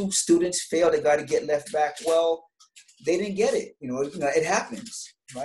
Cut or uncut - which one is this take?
uncut